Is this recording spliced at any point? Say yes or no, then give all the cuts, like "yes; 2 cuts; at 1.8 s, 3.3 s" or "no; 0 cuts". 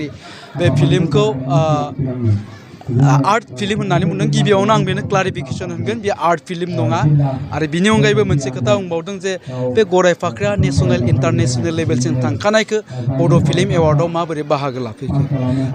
no; 0 cuts